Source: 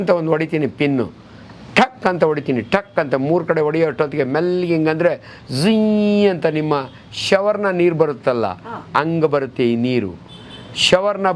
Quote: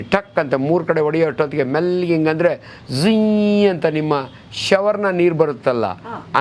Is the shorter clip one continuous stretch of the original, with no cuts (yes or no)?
yes